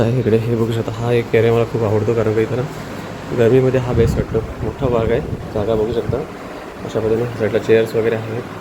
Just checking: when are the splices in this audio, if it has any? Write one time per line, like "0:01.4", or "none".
none